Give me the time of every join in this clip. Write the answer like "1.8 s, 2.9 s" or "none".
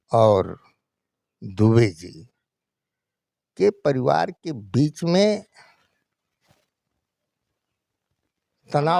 none